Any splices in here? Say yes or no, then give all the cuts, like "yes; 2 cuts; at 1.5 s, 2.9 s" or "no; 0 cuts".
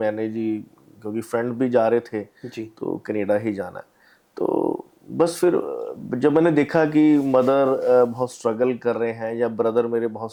no; 0 cuts